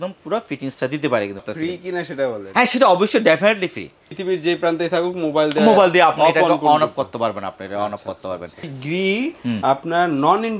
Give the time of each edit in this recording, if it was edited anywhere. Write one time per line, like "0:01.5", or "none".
0:01.5
0:04.1
0:08.7